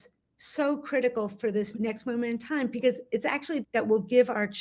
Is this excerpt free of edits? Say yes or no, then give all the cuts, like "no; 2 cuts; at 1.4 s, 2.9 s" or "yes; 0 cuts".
no; 1 cut; at 1.7 s